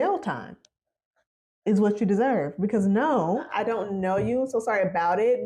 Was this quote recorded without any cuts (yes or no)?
no